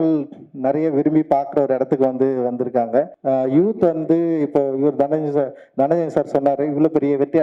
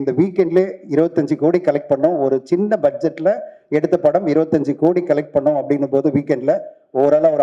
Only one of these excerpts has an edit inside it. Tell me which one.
first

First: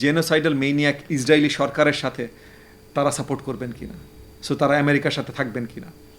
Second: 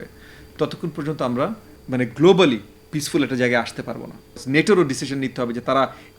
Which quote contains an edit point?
second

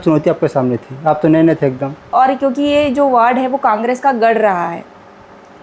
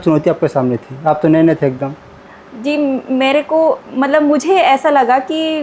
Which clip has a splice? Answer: first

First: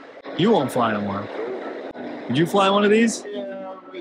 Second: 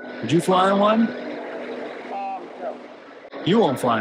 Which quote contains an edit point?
first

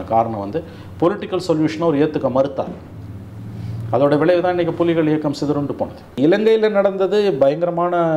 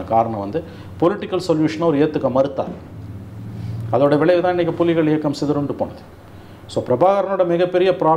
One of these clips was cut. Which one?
first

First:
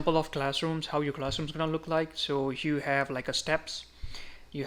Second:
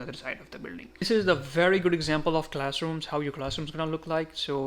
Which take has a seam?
second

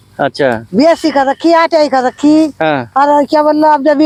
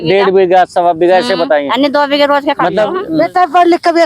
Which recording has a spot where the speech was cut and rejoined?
second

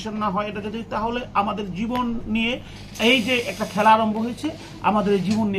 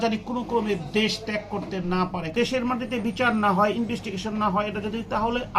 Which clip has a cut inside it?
second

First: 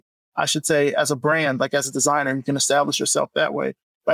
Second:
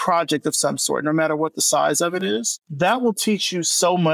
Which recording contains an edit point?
second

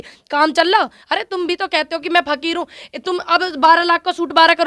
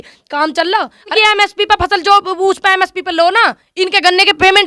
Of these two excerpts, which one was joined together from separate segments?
second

